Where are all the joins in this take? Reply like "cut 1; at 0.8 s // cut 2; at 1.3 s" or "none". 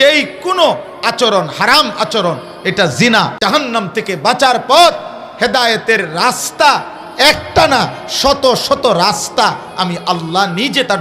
cut 1; at 3.3 s